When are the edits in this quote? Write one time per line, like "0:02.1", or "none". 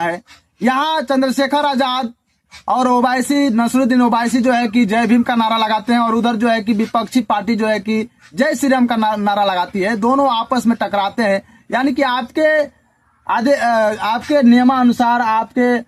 none